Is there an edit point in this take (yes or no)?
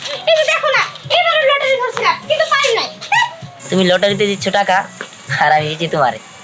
yes